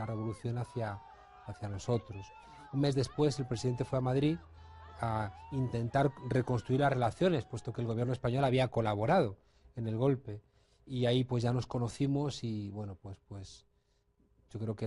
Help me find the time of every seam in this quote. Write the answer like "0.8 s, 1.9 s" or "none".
11.6 s